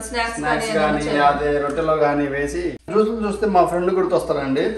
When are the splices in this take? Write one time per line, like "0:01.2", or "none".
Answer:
0:02.8